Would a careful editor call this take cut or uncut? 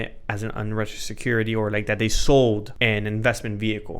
cut